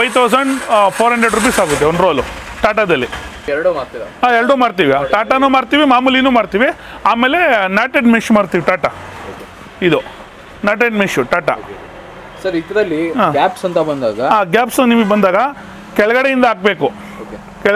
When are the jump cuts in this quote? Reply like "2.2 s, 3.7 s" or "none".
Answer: none